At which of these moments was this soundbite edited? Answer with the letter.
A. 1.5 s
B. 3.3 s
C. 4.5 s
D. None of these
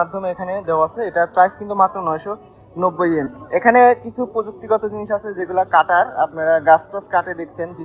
B